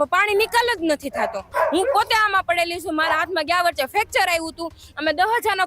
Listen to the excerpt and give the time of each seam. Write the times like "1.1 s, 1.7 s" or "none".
1.5 s